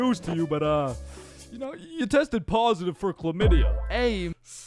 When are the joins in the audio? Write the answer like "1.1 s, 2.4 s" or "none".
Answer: none